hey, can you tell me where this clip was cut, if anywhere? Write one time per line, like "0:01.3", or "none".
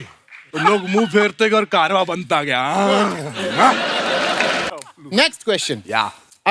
0:04.7